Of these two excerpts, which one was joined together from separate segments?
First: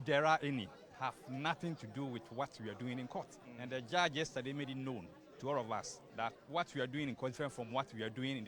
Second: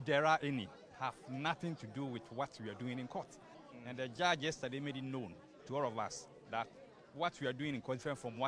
first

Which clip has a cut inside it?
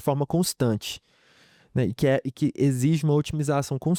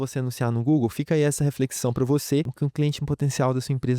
second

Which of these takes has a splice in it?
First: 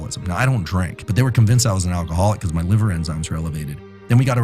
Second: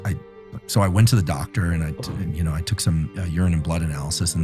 first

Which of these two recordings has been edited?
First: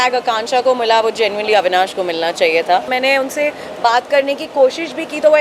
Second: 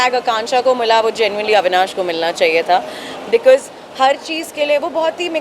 first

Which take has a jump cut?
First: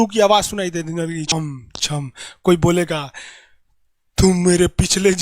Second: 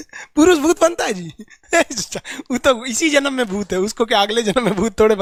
first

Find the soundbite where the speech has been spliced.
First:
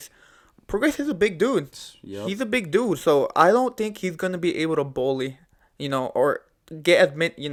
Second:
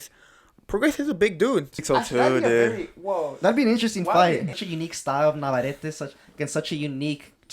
second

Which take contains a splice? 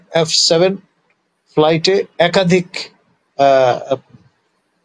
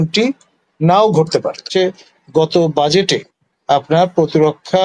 second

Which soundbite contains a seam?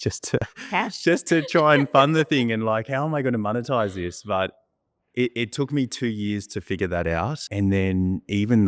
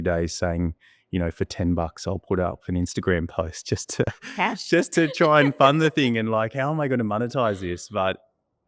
first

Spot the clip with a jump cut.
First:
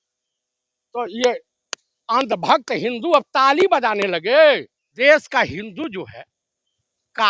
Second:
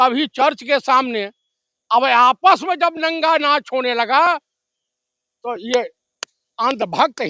first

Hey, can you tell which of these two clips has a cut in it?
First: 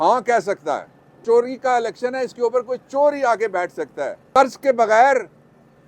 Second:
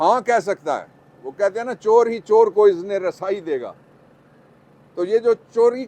first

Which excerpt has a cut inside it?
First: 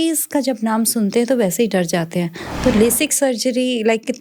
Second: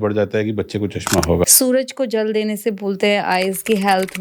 second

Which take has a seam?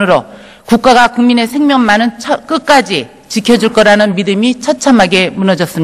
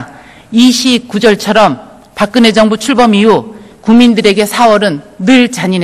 first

